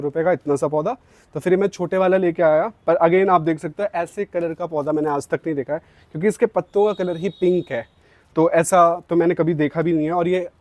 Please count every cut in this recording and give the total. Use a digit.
0